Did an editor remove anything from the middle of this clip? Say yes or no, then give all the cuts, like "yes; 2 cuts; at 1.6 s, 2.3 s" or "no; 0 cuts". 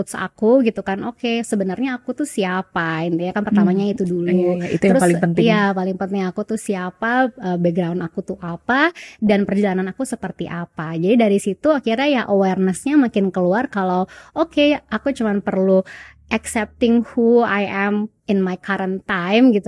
no; 0 cuts